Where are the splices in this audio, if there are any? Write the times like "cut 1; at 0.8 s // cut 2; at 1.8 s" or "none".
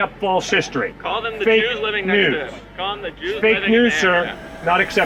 none